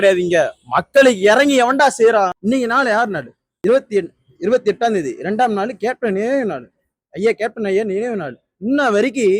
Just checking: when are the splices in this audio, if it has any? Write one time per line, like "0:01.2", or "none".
0:02.4
0:03.4